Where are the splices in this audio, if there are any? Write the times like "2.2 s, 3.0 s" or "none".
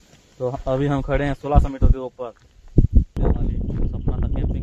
3.1 s